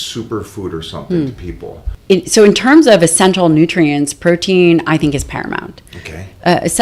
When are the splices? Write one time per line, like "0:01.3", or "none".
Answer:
0:01.9